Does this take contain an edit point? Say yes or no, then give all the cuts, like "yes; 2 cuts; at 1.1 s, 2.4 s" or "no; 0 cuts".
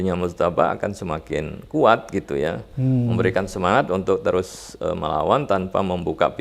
no; 0 cuts